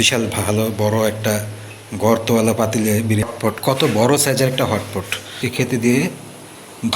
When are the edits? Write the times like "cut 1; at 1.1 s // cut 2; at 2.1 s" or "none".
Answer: cut 1; at 3.2 s // cut 2; at 5.4 s